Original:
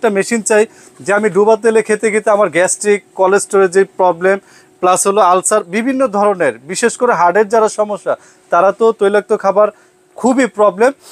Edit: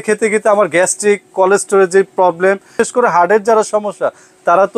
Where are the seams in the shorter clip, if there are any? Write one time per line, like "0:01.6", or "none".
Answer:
0:02.7